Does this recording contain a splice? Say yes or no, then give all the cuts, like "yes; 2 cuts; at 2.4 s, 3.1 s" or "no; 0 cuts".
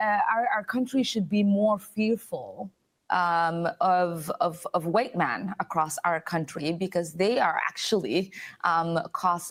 no; 0 cuts